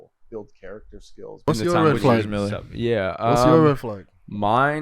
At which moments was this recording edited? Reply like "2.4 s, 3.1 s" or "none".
1.5 s